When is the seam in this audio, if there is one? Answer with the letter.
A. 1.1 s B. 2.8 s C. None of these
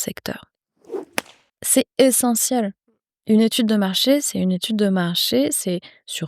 A